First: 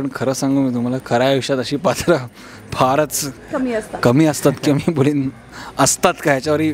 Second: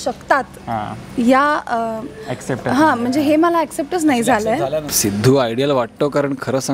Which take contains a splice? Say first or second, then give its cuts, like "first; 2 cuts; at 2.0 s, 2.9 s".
second; 1 cut; at 4.9 s